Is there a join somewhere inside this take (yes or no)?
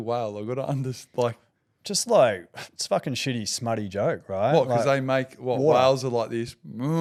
no